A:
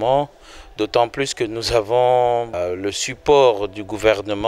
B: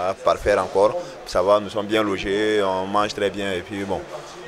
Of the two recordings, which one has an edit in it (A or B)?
A